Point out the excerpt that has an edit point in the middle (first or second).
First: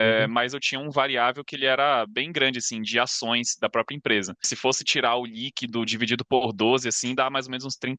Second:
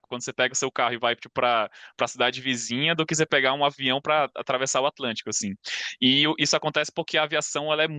first